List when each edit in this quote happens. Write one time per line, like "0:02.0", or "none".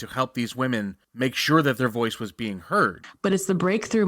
0:01.0
0:03.0